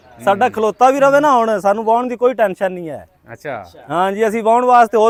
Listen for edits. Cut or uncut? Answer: uncut